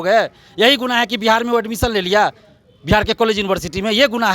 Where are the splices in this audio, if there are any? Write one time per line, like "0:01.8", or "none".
none